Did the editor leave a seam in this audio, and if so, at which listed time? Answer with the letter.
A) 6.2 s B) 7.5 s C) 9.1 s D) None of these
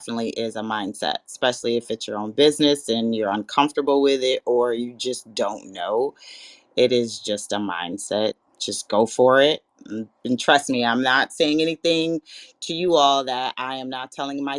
D